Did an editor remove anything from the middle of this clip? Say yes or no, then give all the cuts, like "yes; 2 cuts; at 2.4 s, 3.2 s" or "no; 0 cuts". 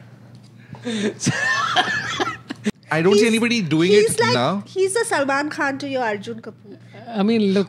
yes; 1 cut; at 2.7 s